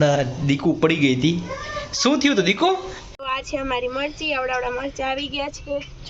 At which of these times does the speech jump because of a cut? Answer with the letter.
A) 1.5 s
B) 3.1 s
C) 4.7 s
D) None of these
B